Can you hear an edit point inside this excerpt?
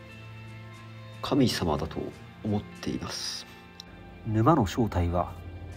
no; 0 cuts

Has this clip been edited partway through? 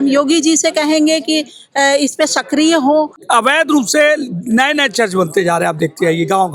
yes; 1 cut; at 3.2 s

